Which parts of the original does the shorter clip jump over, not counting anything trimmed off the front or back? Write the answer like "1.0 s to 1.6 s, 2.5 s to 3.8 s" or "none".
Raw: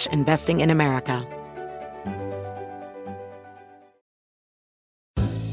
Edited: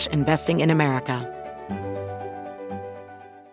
1.2 s to 1.6 s